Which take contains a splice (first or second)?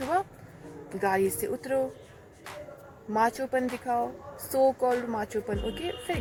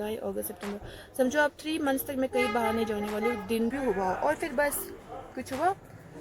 second